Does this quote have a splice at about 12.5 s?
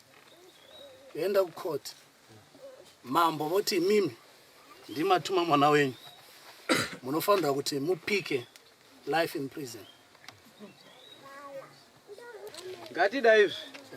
yes; 1 cut; at 12.5 s

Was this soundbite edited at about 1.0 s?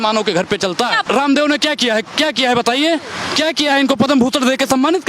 yes; 1 cut; at 1.0 s

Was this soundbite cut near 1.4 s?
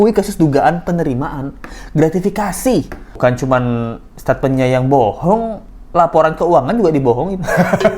no; 1 cut; at 3.0 s

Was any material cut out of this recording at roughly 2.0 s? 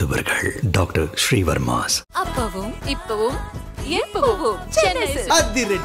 no; 0 cuts

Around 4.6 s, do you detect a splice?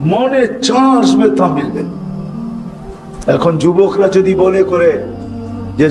no; 2 cuts; at 1.9 s, 3.3 s

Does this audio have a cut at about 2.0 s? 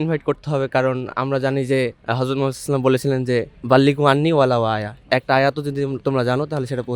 yes; 2 cuts; at 2.0 s, 3.6 s

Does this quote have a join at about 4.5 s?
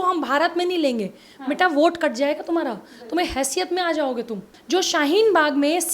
yes; 1 cut; at 4.5 s

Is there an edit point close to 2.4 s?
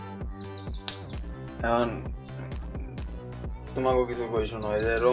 no; 0 cuts

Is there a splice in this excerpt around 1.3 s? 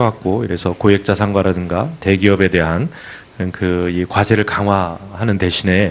no; 1 cut; at 2.6 s

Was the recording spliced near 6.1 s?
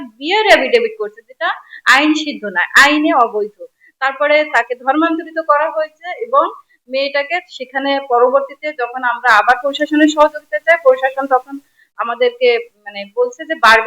no; 0 cuts

